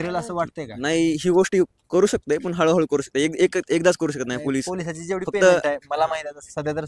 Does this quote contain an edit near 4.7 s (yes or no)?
no